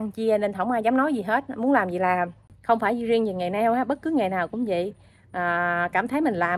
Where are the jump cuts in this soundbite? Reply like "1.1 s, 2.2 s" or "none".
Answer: 2.5 s